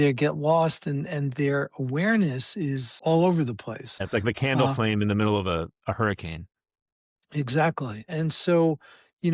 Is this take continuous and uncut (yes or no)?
no